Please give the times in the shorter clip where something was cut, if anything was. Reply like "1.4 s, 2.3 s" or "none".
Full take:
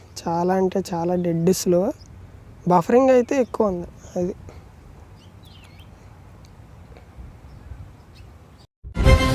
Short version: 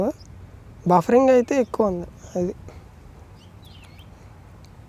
none